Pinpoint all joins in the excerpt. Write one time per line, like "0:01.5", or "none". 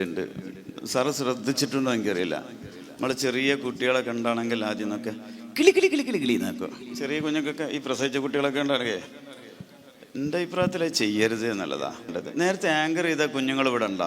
0:12.2